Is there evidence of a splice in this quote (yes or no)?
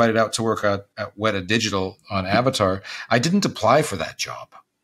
yes